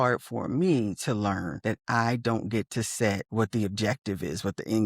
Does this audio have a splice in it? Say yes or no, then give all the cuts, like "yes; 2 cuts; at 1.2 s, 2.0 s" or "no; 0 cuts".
yes; 2 cuts; at 1.5 s, 3.2 s